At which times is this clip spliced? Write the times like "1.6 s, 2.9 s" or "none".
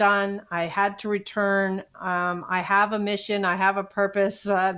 none

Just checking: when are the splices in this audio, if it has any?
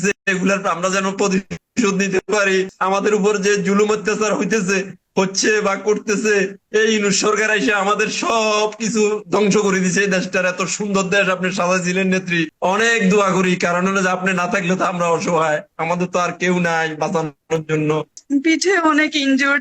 12.5 s, 18.2 s

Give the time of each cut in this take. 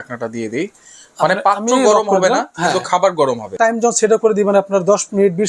3.5 s

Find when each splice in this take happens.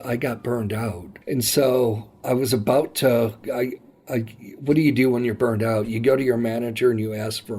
1.1 s

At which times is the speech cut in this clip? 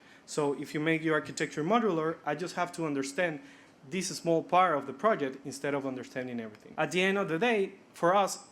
6.6 s

